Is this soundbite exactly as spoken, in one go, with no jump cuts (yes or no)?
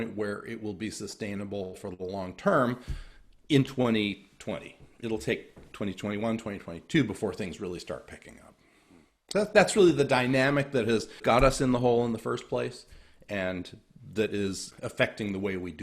no